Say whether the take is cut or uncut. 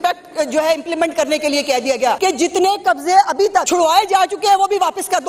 cut